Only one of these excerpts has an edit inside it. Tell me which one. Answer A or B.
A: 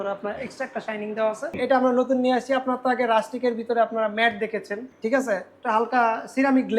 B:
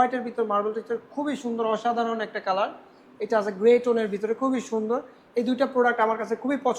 A